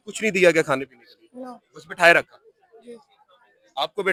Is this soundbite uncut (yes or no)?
yes